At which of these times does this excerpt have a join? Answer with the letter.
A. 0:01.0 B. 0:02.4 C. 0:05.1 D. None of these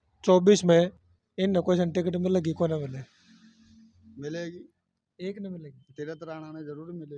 A